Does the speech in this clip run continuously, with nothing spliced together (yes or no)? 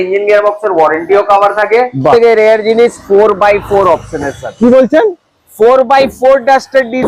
no